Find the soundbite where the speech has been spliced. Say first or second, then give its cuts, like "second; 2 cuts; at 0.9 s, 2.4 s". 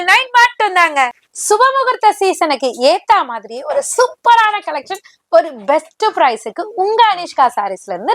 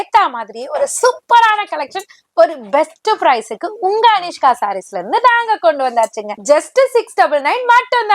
second; 1 cut; at 6.3 s